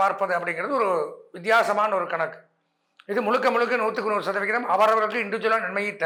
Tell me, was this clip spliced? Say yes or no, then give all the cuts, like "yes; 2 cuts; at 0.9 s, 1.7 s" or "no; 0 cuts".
no; 0 cuts